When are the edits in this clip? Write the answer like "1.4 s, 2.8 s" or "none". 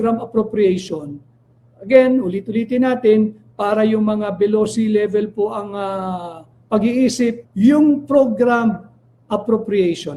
7.4 s